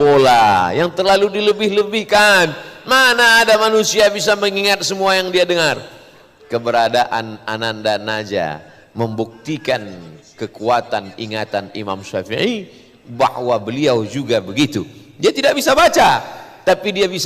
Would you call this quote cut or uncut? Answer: uncut